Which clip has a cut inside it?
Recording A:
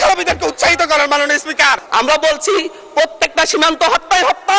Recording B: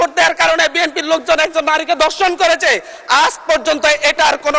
A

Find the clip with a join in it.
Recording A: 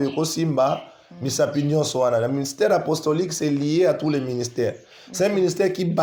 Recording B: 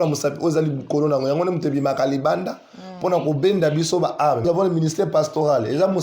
B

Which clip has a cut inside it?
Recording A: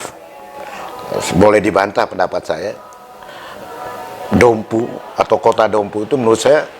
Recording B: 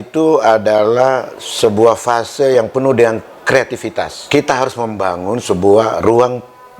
B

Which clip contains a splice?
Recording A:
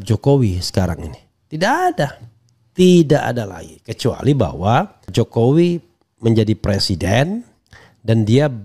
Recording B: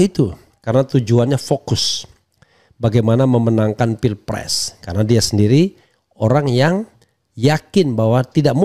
A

